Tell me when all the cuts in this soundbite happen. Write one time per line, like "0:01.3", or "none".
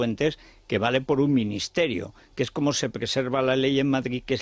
0:03.4